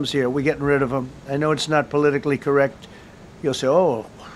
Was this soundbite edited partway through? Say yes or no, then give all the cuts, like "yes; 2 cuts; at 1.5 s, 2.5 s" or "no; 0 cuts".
no; 0 cuts